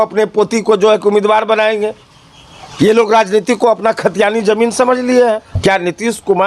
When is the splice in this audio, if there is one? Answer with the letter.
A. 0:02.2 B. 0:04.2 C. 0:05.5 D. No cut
C